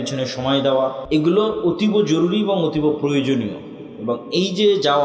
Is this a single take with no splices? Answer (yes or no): no